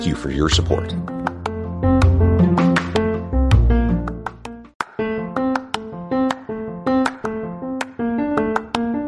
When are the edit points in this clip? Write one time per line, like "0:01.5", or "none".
0:04.6